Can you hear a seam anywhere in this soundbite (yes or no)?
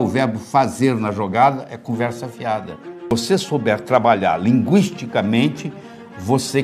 yes